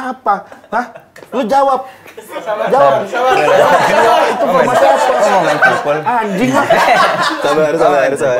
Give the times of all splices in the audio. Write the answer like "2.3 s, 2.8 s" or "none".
none

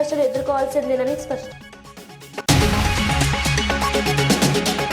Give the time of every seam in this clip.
1.5 s

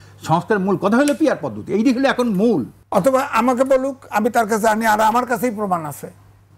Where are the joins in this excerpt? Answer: 2.8 s

